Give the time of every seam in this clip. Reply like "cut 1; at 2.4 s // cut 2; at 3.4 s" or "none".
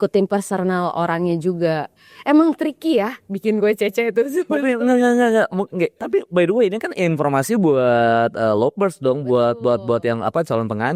none

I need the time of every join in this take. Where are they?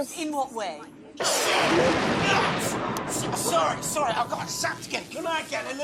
none

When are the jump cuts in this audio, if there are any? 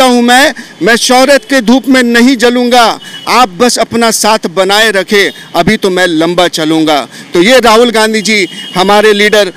none

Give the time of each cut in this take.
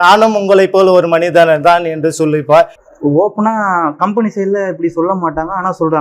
cut 1; at 2.8 s

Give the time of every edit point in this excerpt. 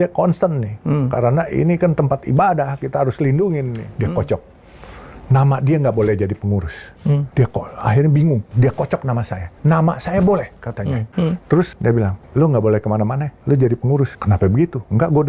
cut 1; at 3.8 s // cut 2; at 7.3 s // cut 3; at 8.5 s // cut 4; at 9.4 s // cut 5; at 11.0 s // cut 6; at 11.9 s // cut 7; at 13.3 s // cut 8; at 14.2 s

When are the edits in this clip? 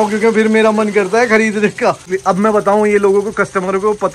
cut 1; at 2.1 s

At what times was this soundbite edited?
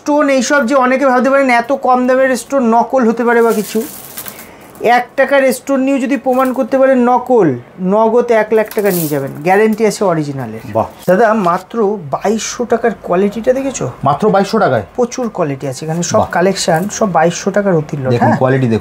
cut 1; at 11.0 s

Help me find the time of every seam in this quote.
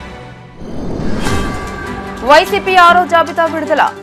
none

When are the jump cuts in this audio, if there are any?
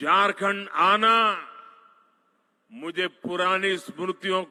none

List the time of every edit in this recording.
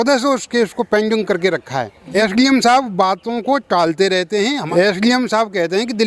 cut 1; at 2.0 s // cut 2; at 4.6 s

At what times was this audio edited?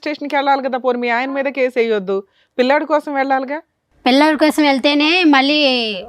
none

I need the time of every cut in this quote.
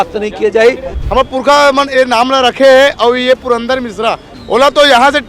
cut 1; at 0.9 s // cut 2; at 4.3 s

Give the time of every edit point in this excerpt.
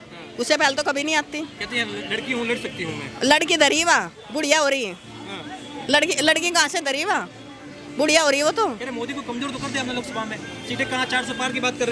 none

